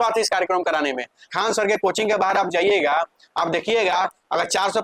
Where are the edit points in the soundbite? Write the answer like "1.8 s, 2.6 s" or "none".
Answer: 1.2 s